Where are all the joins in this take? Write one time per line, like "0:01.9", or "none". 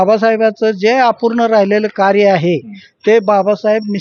none